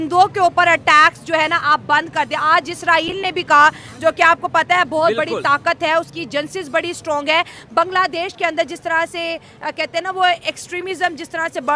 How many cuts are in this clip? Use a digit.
0